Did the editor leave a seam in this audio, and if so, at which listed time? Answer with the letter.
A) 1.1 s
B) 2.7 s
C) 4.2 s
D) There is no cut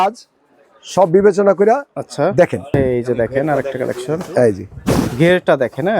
B